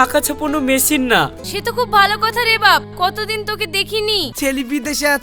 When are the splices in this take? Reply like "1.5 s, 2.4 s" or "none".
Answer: 1.5 s, 4.3 s